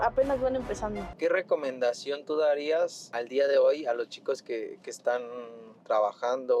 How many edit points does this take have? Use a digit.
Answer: 2